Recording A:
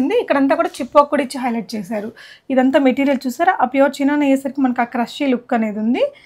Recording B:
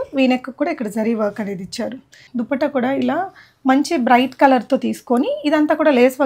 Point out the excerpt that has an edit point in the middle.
B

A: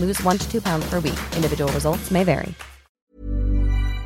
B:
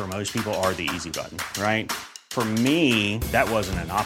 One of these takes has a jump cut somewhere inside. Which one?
A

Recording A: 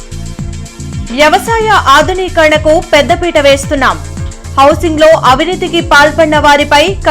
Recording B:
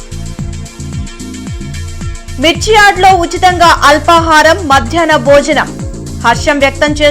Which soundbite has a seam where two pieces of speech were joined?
A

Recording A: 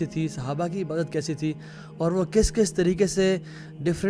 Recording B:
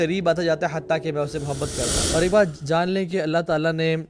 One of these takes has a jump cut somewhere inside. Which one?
B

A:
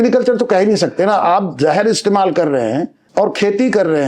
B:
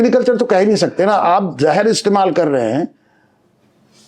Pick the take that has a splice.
A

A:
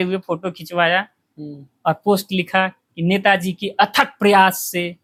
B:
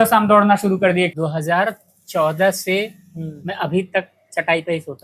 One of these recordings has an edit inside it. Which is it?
B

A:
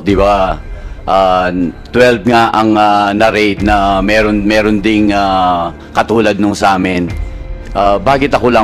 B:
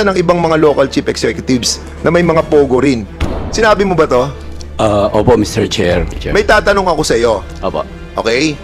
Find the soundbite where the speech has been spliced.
B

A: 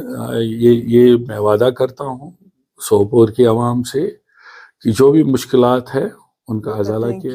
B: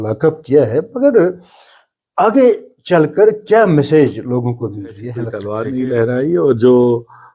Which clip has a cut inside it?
B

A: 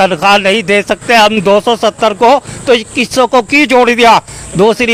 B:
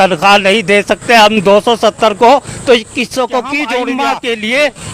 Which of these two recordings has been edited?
B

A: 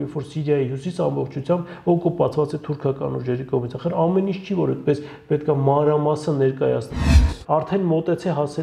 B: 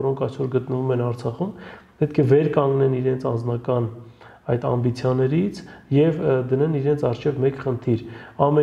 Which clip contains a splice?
A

